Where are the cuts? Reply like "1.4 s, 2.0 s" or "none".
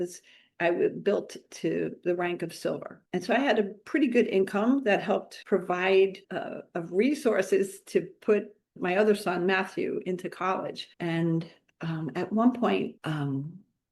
6.2 s, 8.7 s